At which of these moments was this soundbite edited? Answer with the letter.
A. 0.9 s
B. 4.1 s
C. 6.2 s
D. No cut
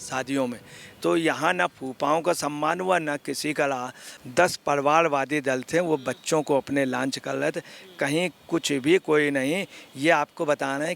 B